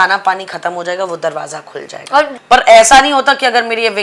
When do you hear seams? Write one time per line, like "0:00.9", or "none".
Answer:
0:02.3